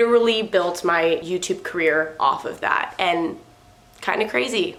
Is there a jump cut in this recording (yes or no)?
no